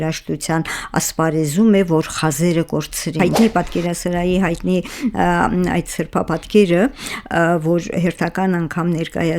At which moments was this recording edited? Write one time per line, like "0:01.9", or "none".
0:03.4